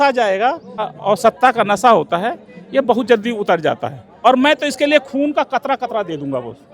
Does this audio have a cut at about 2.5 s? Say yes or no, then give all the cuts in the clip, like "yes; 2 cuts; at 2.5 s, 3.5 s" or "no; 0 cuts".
no; 2 cuts; at 0.9 s, 4.0 s